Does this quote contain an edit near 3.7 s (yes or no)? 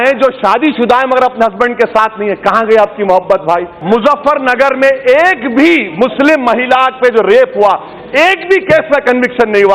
yes